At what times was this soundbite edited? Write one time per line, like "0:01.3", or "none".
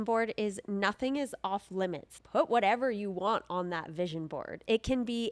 0:02.1